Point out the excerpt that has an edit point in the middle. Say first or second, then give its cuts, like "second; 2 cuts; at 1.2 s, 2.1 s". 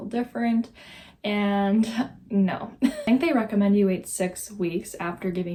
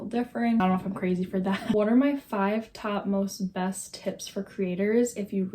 second; 1 cut; at 1.2 s